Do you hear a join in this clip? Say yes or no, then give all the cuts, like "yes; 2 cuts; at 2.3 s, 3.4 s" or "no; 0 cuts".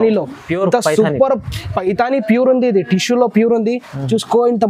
no; 0 cuts